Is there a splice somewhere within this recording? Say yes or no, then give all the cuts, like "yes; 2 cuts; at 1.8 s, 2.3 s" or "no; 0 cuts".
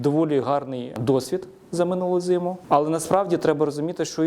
yes; 2 cuts; at 0.9 s, 2.6 s